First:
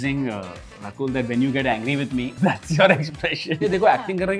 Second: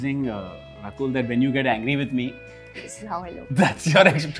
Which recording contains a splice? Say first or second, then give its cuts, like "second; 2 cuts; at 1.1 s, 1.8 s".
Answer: first; 2 cuts; at 2.3 s, 3.6 s